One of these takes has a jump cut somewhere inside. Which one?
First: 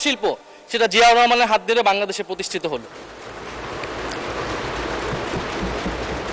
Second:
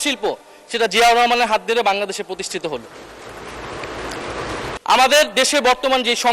second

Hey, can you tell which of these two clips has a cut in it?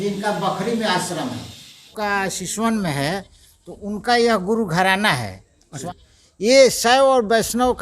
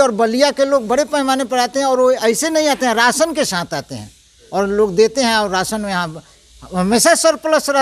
first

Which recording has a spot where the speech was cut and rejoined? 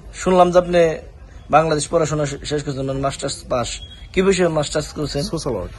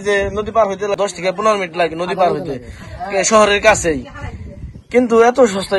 second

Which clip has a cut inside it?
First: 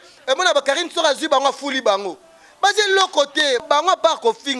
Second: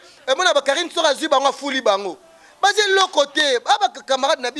first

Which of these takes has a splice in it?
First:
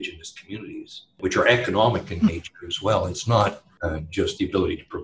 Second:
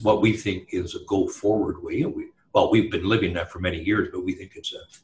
first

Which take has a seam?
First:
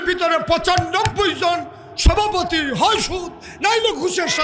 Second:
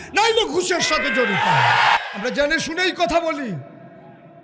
second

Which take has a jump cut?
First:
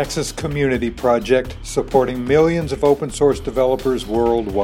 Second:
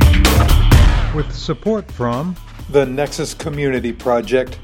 second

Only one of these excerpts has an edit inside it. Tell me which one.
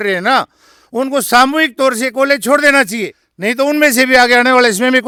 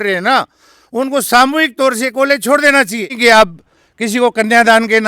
second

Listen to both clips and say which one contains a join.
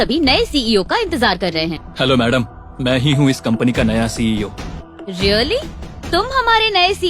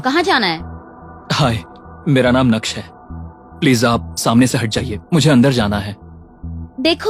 first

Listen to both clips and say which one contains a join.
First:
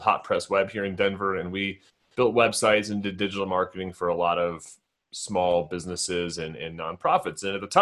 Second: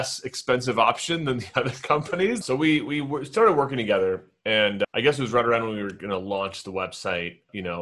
second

